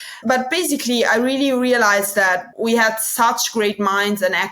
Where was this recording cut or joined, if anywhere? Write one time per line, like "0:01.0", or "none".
0:02.5